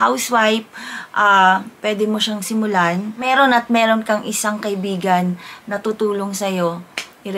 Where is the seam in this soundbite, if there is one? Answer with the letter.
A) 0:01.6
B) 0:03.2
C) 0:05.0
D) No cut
B